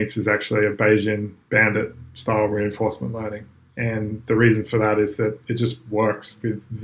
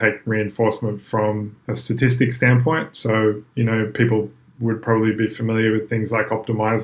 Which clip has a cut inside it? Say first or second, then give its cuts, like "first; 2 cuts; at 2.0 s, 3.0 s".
second; 1 cut; at 1.6 s